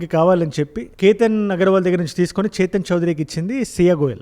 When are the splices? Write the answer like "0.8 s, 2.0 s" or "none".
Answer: none

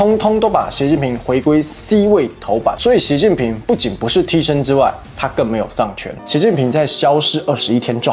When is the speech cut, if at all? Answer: 2.8 s, 6.1 s

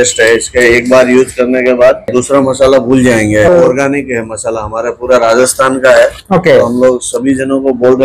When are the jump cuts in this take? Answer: 2.1 s, 3.5 s

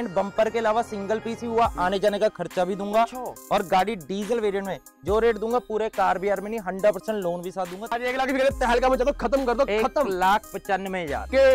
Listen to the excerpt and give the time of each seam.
8.0 s

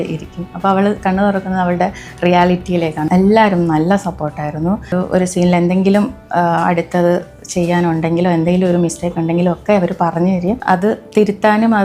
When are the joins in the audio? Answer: 3.1 s, 4.9 s, 10.6 s

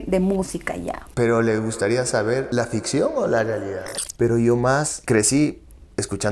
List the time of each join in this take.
1.1 s, 2.5 s, 3.8 s, 4.9 s

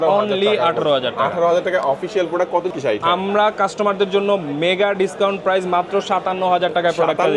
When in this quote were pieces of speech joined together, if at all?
2.7 s

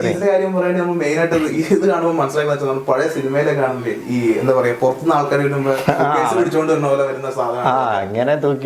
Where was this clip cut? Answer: none

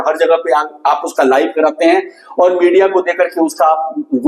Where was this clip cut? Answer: none

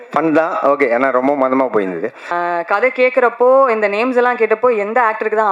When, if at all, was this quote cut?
2.3 s

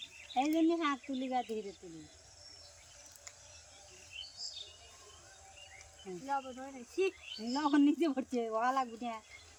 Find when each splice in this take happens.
none

